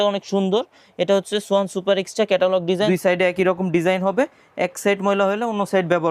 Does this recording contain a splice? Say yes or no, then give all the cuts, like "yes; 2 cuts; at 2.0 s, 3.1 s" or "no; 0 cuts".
yes; 1 cut; at 2.9 s